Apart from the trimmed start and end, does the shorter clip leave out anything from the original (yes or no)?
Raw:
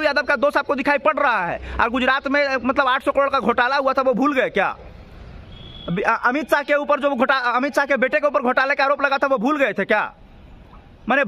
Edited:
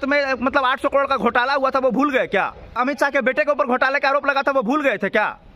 yes